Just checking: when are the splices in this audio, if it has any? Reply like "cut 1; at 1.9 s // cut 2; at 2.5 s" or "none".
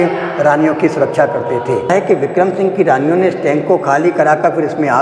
cut 1; at 1.9 s